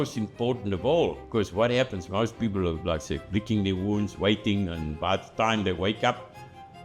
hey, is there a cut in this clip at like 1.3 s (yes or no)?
yes